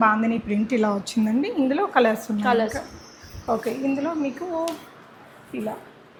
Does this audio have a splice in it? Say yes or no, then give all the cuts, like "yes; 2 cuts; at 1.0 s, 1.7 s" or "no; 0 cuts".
no; 0 cuts